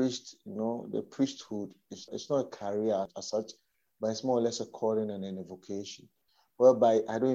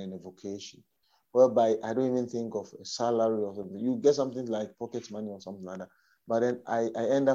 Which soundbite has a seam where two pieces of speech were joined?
first; 2 cuts; at 2.1 s, 3.2 s

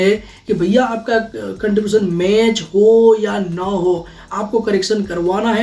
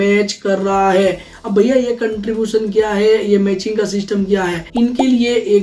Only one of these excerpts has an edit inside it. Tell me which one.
second; 1 cut; at 4.6 s

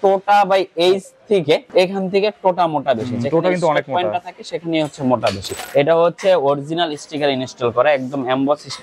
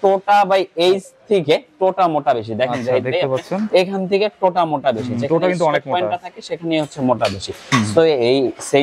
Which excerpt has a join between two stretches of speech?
first; 2 cuts; at 1.7 s, 5.6 s

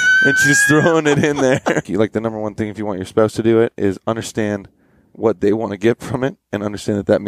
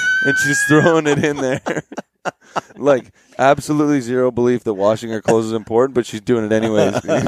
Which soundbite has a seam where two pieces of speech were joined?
first; 1 cut; at 1.9 s

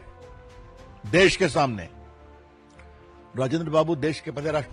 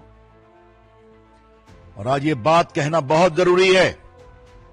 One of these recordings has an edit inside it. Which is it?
first; 2 cuts; at 1.9 s, 3.3 s

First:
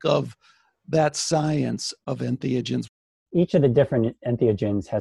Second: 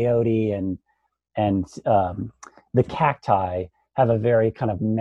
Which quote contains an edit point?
first; 2 cuts; at 1.9 s, 2.9 s

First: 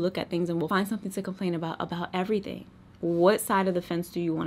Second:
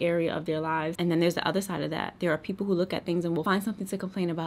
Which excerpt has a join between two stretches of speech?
second; 1 cut; at 0.9 s

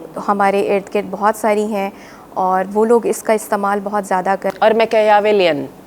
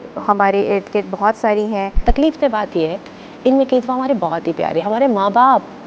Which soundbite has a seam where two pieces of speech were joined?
second; 1 cut; at 2.0 s

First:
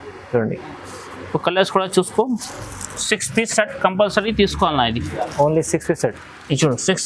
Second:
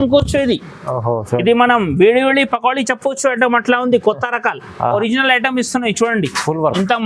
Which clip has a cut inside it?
second; 1 cut; at 4.9 s

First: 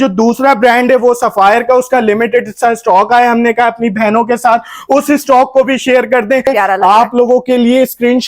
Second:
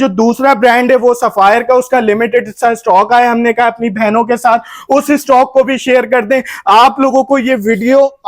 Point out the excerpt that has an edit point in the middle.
first; 1 cut; at 6.5 s

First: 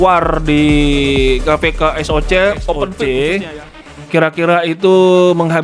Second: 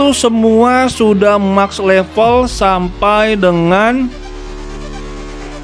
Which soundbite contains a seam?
first; 1 cut; at 2.9 s

